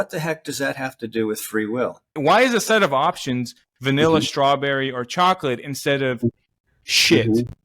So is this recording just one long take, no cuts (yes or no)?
no